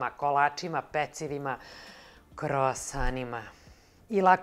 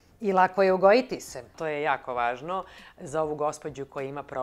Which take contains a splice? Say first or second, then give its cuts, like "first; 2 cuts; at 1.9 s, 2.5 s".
second; 1 cut; at 1.5 s